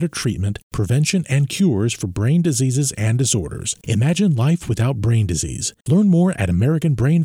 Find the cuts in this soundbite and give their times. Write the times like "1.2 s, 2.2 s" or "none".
none